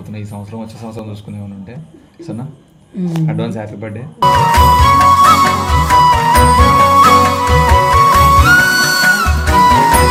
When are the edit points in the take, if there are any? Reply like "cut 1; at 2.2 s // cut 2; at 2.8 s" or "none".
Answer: none